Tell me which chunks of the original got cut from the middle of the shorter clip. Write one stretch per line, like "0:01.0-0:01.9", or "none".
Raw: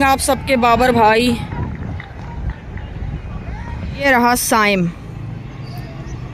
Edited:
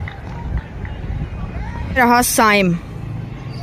0:03.9-0:04.1